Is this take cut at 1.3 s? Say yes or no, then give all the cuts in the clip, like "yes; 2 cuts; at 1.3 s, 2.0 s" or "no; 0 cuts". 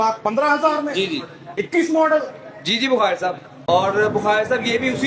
no; 1 cut; at 3.5 s